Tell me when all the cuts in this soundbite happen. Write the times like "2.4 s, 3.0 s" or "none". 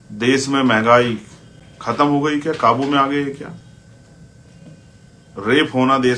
none